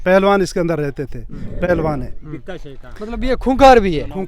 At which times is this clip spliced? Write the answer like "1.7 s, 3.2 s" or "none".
1.7 s

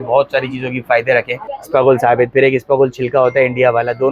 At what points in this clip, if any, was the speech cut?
1.5 s

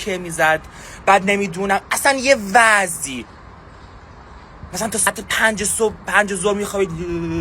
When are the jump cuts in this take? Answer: 5.1 s

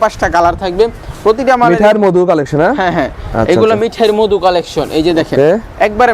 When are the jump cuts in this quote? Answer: none

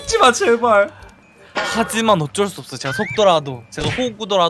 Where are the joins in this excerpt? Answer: none

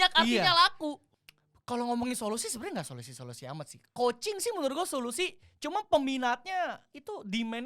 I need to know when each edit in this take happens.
1.1 s

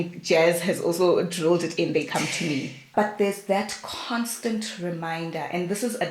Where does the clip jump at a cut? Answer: 2.9 s

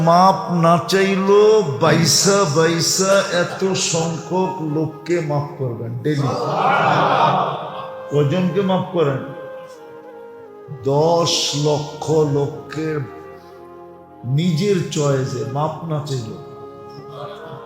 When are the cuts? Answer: 16.4 s

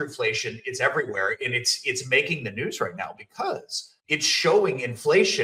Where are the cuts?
none

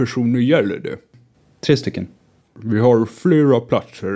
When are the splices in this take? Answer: 1.2 s, 2.3 s

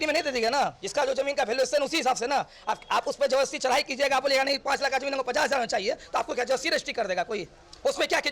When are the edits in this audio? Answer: none

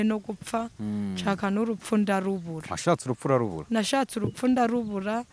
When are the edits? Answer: none

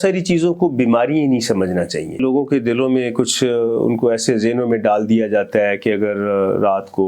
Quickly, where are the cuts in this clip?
2.2 s

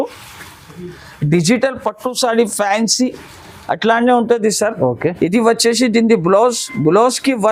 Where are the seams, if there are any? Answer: none

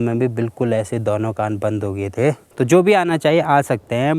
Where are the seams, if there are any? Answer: 2.5 s

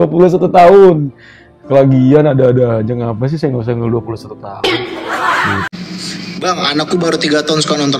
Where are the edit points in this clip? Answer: 5.7 s

